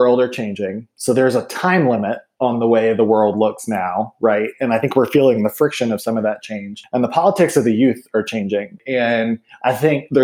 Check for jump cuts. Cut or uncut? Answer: cut